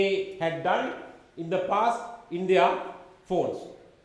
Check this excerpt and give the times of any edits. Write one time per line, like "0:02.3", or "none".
none